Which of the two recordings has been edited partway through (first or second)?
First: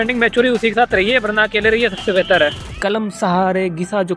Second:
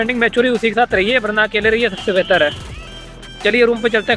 first